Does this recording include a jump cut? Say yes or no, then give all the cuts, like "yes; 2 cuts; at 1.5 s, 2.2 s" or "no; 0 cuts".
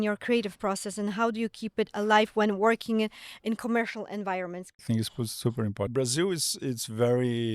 yes; 2 cuts; at 4.8 s, 5.9 s